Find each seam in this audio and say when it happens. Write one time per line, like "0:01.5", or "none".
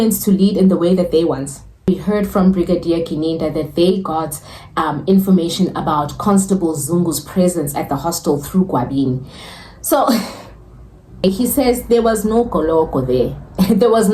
0:01.8
0:11.2